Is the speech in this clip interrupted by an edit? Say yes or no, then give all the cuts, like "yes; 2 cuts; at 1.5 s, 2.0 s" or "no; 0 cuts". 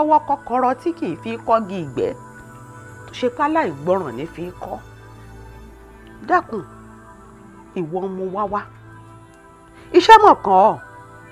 no; 0 cuts